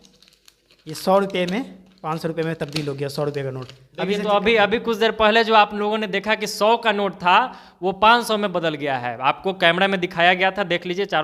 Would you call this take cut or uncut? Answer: uncut